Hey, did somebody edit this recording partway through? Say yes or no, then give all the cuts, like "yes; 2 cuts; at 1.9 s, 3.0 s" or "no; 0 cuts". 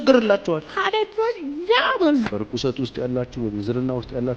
yes; 1 cut; at 2.3 s